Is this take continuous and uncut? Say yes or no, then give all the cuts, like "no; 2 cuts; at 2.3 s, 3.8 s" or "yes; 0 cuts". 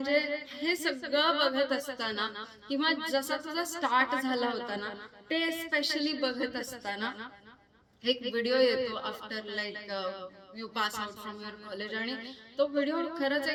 yes; 0 cuts